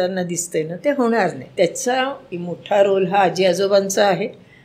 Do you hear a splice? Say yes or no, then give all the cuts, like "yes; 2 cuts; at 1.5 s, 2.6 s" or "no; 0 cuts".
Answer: yes; 2 cuts; at 1.4 s, 2.3 s